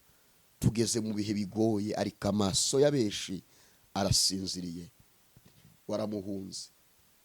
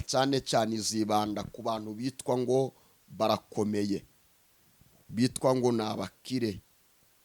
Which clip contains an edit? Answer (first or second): first